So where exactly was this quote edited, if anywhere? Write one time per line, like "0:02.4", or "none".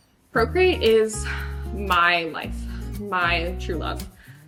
none